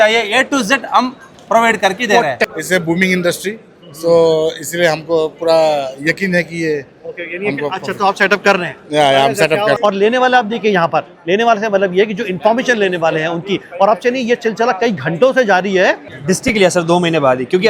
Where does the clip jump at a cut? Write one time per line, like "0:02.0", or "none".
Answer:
0:02.5
0:09.8
0:16.1